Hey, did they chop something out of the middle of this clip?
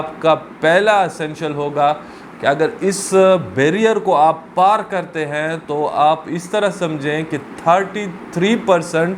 no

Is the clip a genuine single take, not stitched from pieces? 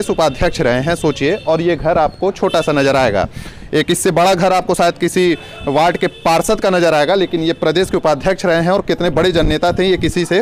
yes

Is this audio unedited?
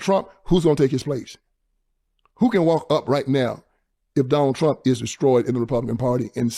yes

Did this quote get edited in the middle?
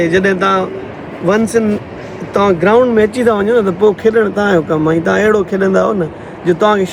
no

